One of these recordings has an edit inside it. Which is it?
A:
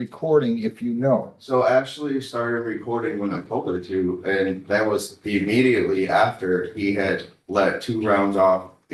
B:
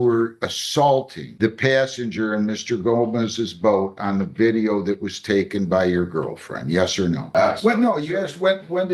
B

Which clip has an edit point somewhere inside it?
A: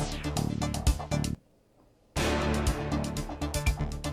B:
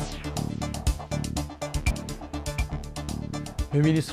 A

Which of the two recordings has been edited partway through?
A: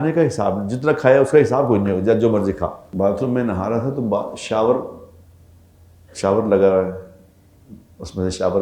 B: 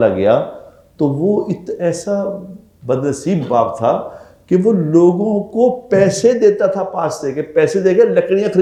A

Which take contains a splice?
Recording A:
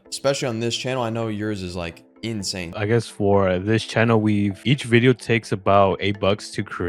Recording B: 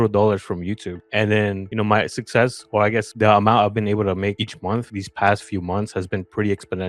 A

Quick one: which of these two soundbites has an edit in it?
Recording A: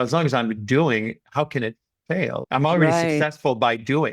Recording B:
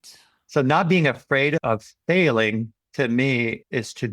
B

